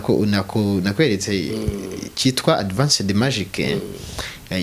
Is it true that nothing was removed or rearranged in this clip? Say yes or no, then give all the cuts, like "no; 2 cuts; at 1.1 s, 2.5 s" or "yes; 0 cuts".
yes; 0 cuts